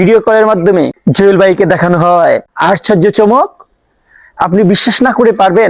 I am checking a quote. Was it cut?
yes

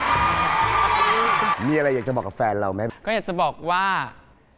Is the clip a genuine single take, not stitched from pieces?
no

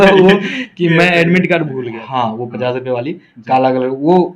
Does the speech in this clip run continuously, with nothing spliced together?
no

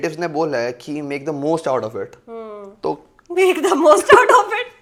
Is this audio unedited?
yes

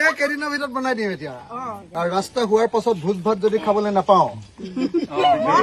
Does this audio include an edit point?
yes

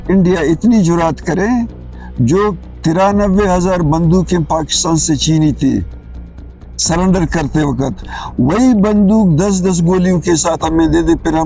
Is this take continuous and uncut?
yes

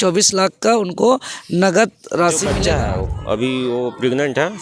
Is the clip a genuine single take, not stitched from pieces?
no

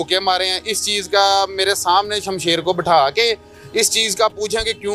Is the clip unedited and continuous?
yes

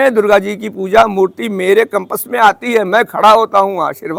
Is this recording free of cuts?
yes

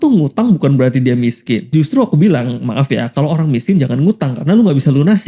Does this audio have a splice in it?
no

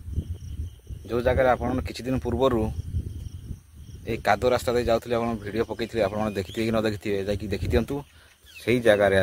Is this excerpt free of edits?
yes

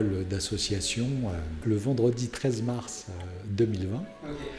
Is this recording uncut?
no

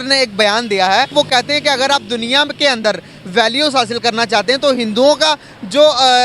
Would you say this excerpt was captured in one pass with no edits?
no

